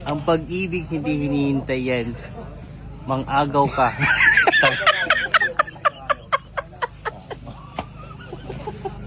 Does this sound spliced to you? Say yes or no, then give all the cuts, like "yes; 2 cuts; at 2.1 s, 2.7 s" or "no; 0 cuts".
no; 0 cuts